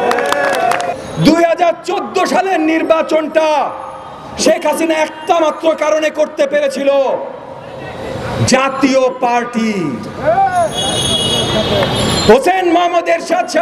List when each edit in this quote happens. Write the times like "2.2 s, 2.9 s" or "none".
0.9 s